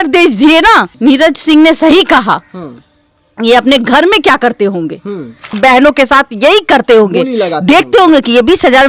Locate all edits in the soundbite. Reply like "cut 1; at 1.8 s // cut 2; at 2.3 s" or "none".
cut 1; at 0.9 s // cut 2; at 5.6 s

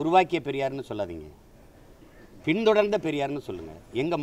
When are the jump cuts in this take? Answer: none

